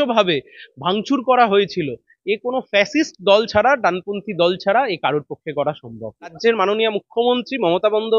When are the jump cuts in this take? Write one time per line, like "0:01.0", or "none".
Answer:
0:06.4